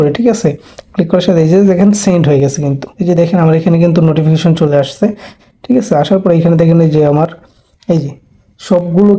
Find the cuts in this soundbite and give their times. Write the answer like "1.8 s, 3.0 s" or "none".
2.9 s, 5.4 s